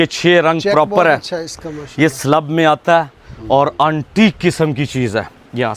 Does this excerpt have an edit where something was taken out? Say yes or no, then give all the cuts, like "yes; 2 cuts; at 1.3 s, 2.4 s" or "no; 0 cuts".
no; 0 cuts